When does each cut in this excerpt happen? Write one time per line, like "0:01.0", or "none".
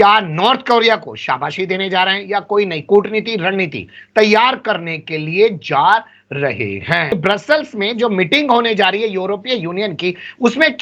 0:07.1